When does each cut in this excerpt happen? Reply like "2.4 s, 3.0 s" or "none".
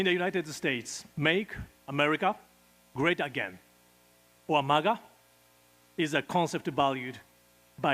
1.0 s